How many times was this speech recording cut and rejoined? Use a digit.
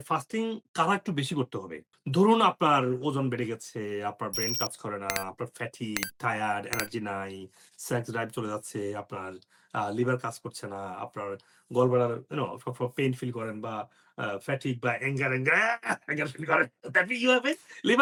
0